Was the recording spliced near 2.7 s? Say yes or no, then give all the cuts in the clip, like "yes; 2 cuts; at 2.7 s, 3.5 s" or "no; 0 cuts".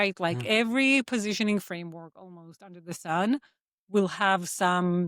no; 0 cuts